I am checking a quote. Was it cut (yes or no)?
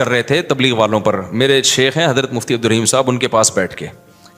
no